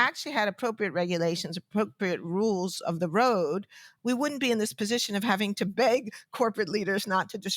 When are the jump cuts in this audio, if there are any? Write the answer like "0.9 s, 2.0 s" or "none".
3.9 s

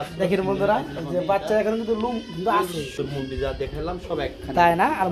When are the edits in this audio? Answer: 2.9 s

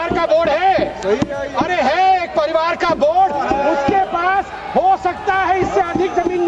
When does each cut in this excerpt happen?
none

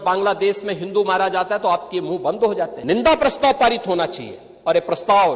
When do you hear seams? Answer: 2.8 s

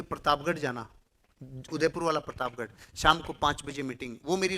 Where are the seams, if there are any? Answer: none

